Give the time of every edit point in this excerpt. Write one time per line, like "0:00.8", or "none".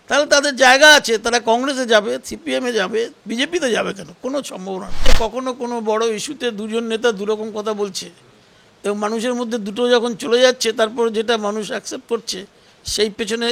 0:05.1